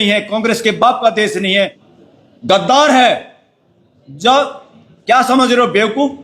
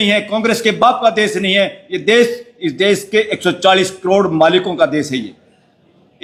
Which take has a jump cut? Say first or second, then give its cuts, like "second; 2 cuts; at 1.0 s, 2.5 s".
first; 1 cut; at 1.8 s